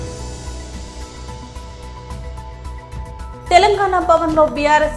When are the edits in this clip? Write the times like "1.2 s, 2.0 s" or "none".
none